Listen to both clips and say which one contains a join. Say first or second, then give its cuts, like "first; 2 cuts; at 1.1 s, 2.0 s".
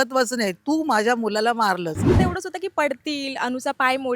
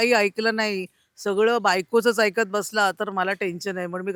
first; 1 cut; at 2.1 s